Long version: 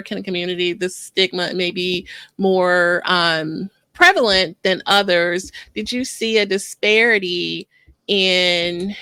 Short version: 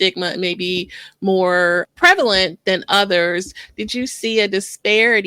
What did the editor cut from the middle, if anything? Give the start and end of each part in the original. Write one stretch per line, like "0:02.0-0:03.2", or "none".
0:03.0-0:03.9

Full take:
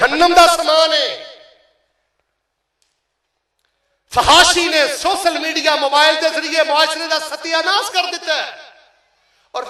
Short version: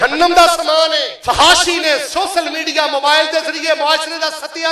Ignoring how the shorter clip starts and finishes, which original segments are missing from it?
0:01.0-0:03.9

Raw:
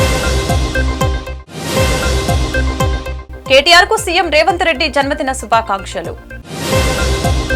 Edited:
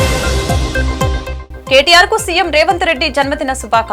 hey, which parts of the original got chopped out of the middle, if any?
0:01.3-0:03.1

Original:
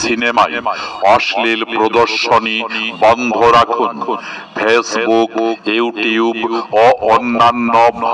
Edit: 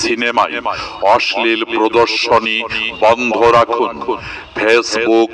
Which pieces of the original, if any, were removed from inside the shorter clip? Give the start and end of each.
none

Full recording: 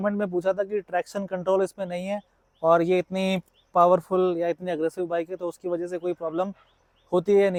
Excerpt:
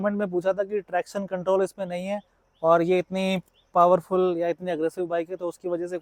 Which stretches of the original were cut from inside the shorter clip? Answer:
none

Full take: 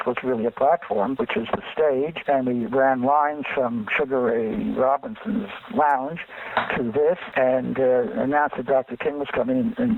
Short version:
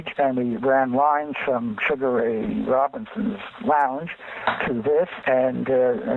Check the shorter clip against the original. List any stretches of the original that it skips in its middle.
none

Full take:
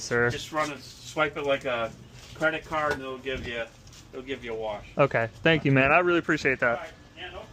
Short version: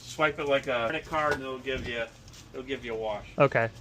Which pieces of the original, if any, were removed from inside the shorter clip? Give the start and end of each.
0:02.0-0:02.6

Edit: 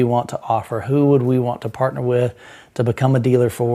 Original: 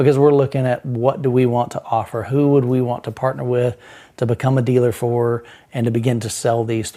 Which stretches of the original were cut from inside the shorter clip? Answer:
none

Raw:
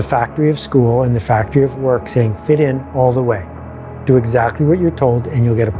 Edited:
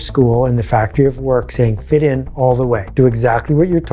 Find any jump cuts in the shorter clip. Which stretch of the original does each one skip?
0:03.4-0:04.0

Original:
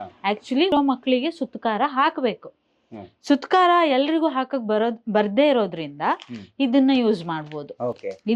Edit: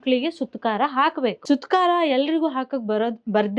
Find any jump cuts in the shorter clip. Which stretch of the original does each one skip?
0:02.4-0:03.2

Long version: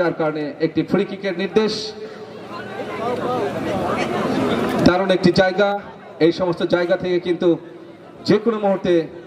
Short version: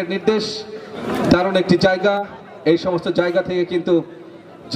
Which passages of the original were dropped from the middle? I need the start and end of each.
0:02.3-0:04.6

